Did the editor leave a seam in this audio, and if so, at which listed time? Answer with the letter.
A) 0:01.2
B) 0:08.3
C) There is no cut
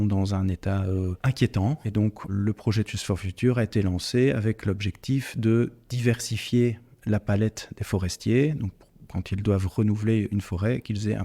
A